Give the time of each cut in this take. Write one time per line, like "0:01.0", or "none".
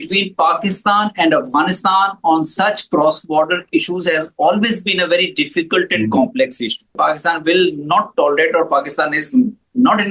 0:06.9